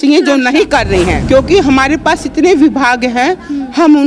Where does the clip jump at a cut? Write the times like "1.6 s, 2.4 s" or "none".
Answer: 1.2 s